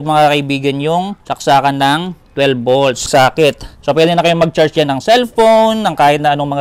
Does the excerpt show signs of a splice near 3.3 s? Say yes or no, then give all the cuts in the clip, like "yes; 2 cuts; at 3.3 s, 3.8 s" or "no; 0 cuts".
yes; 2 cuts; at 1.2 s, 3.3 s